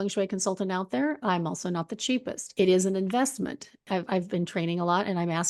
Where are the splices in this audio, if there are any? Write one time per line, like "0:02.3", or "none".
0:02.4
0:03.7